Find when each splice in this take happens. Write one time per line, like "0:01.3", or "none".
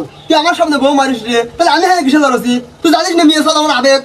none

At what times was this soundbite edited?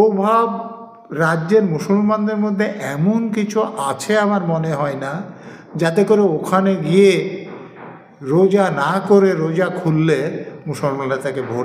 none

